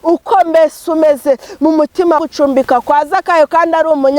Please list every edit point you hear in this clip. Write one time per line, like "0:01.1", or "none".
0:02.2